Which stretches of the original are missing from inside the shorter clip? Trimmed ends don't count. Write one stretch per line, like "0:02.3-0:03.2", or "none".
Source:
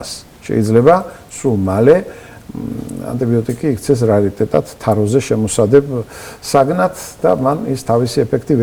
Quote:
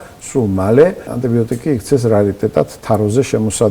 0:02.2-0:03.0